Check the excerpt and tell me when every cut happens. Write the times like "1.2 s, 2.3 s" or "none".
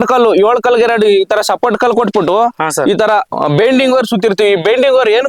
none